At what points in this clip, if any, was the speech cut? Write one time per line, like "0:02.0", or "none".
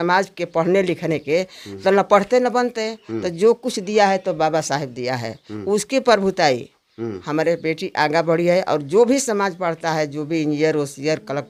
none